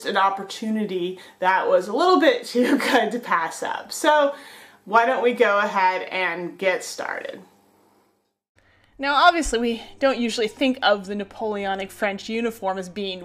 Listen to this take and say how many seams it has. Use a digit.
0